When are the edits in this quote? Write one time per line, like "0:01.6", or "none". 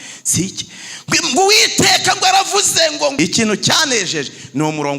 0:03.1